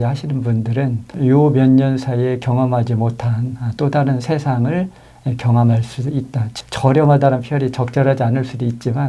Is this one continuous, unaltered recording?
no; 1 cut; at 6.5 s

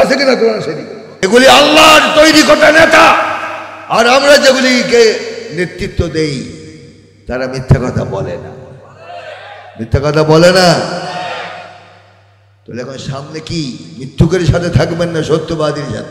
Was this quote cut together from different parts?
yes; 1 cut; at 1.3 s

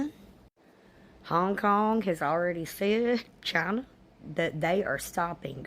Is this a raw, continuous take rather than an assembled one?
yes; 0 cuts

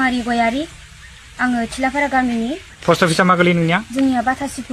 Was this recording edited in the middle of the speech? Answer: no; 0 cuts

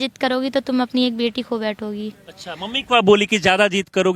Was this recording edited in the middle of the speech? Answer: no; 0 cuts

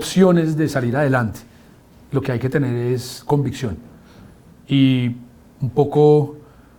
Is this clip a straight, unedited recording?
yes; 0 cuts

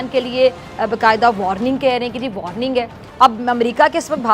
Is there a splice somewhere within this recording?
yes; 1 cut; at 3.0 s

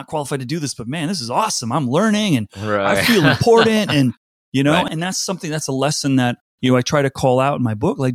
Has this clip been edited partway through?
yes; 2 cuts; at 4.9 s, 6.5 s

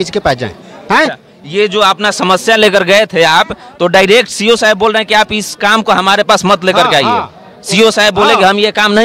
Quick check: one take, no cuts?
yes; 0 cuts

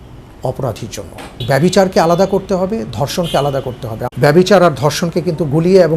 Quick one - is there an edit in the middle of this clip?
yes; 2 cuts; at 1.4 s, 4.0 s

